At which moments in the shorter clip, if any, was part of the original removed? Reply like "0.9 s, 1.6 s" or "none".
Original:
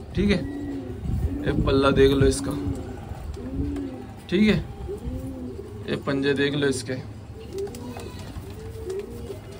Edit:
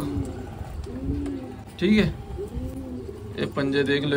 none